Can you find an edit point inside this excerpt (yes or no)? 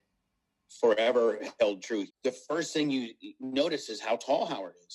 yes